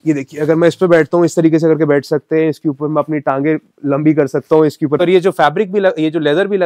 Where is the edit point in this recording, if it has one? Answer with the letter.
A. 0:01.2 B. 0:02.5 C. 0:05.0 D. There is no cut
C